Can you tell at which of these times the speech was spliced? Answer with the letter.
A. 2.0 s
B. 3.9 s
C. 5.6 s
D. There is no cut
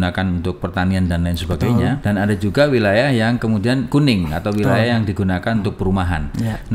A